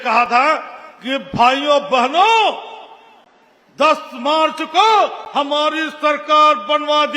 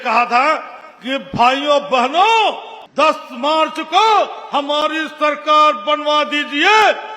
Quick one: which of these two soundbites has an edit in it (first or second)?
second